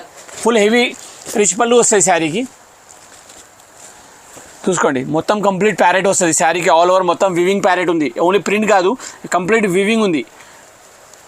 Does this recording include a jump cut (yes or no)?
no